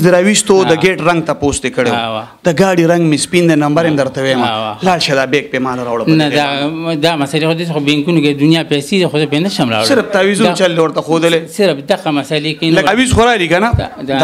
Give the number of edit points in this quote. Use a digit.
1